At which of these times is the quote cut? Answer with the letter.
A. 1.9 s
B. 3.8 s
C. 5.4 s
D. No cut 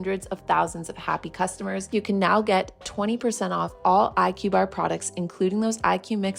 A